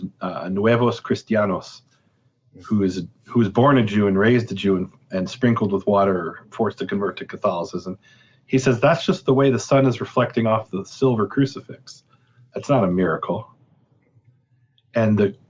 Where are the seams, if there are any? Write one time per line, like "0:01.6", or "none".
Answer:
none